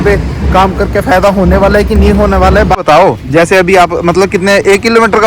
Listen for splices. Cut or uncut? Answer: cut